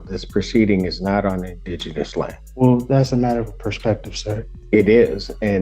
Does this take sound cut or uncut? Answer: cut